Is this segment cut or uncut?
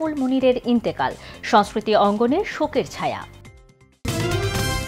cut